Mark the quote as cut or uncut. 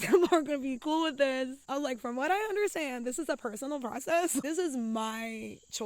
cut